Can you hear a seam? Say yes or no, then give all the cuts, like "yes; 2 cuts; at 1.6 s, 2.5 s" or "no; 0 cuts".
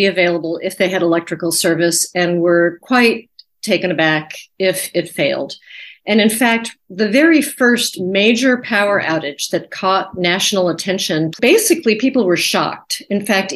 yes; 1 cut; at 11.4 s